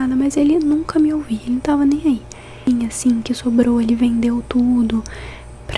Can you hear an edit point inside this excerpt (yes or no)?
yes